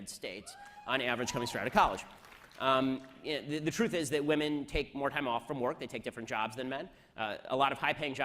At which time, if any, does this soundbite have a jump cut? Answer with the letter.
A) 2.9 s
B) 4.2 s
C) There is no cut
A